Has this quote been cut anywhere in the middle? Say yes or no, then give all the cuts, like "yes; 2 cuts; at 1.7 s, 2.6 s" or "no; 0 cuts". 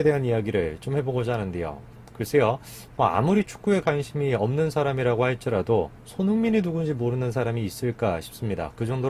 no; 0 cuts